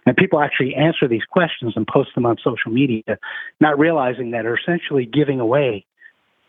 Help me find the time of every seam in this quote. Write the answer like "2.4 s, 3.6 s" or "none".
none

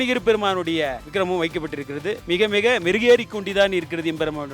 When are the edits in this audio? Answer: 1.0 s, 2.2 s

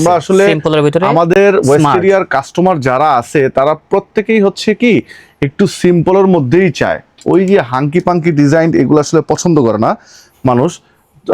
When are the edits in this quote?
none

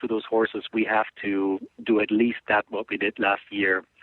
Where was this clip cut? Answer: none

